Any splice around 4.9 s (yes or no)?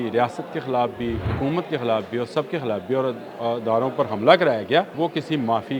yes